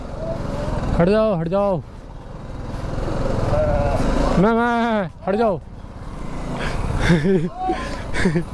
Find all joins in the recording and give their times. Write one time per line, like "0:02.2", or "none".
none